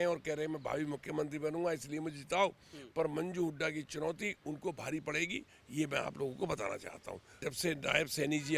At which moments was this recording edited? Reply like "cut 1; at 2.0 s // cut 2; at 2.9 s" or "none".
cut 1; at 7.4 s